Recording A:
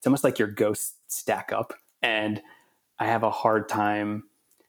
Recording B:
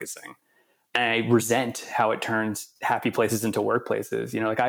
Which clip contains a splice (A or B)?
B